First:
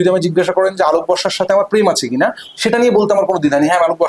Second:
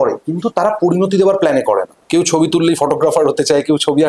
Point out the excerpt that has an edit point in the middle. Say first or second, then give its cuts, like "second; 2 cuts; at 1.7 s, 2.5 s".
second; 1 cut; at 2.0 s